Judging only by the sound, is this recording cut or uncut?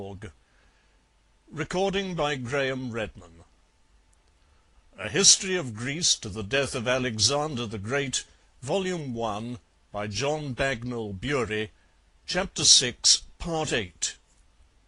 cut